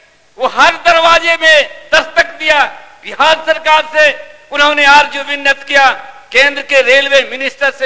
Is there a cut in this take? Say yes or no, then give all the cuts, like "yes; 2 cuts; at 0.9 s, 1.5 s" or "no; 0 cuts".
no; 0 cuts